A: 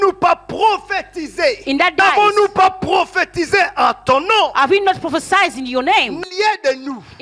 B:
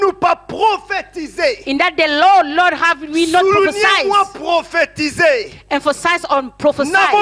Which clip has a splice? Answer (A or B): A